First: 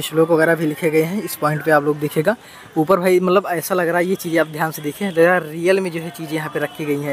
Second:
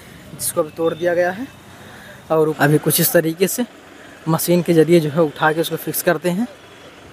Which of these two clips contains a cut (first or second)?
second